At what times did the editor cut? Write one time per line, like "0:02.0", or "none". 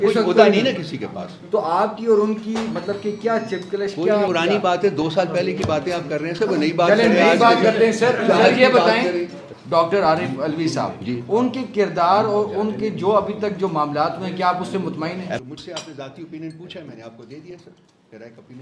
0:04.3
0:09.4
0:15.5